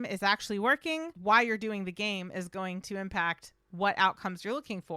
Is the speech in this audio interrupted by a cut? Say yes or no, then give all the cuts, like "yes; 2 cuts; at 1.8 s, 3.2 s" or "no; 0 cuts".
yes; 1 cut; at 1.1 s